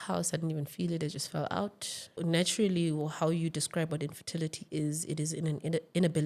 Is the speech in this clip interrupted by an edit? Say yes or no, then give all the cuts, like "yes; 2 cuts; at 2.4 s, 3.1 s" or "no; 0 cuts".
yes; 1 cut; at 2.2 s